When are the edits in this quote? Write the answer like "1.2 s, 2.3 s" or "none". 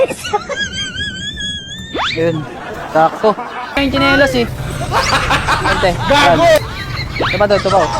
3.8 s